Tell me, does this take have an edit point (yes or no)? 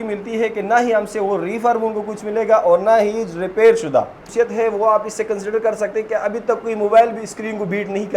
yes